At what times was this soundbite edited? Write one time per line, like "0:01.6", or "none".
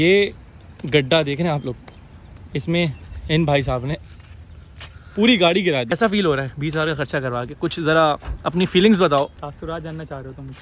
0:05.9

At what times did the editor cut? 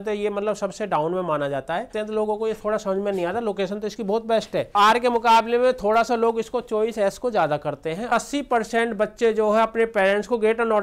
0:01.9
0:04.7
0:08.1

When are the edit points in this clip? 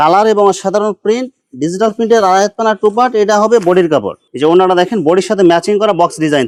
none

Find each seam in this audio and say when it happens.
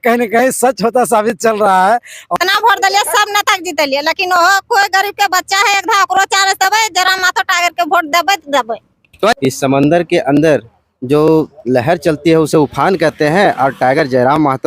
0:02.4
0:09.4

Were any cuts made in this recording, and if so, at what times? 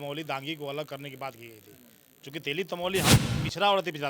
0:03.1

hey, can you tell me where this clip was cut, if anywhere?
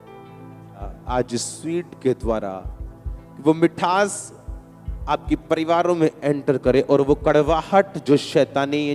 0:00.9

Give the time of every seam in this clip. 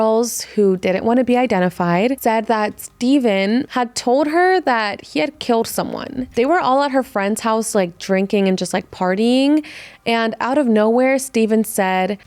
0:02.2
0:03.7

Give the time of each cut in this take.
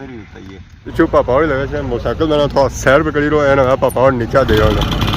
0:00.9

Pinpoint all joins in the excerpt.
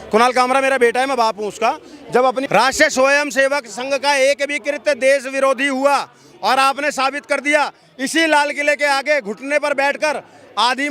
0:02.4

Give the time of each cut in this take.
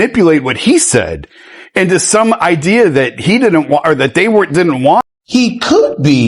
0:05.0

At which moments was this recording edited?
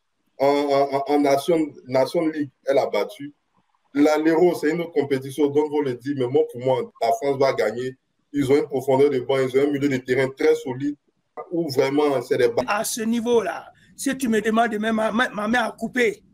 0:11.4
0:12.6

